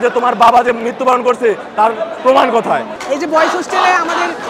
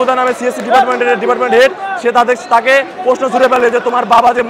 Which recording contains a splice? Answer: first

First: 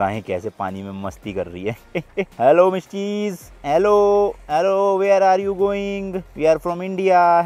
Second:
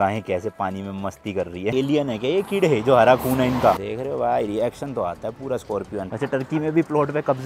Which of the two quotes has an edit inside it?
second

